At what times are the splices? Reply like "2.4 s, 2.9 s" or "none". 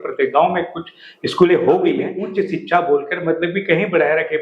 2.2 s

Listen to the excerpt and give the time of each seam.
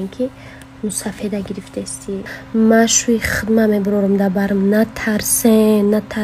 2.3 s

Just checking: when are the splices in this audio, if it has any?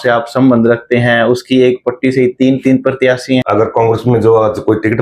3.4 s

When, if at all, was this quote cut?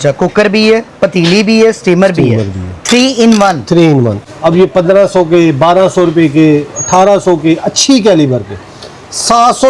4.2 s

